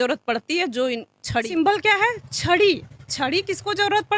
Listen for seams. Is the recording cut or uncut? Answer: cut